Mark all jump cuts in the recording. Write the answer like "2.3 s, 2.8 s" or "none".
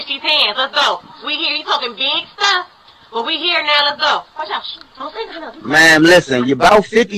2.3 s, 4.6 s